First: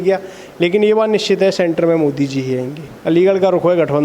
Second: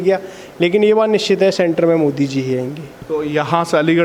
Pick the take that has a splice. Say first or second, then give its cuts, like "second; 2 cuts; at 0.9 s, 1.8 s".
first; 1 cut; at 2.9 s